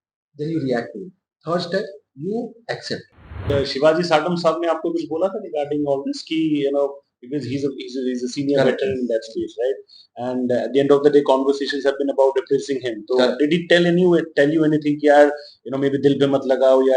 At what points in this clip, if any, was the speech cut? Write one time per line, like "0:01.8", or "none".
0:03.5